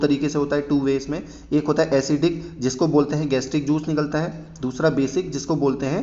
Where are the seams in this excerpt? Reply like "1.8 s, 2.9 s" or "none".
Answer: none